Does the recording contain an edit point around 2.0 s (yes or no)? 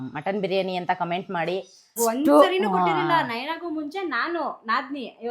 yes